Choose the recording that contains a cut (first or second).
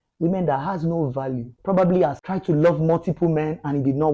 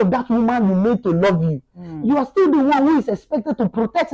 first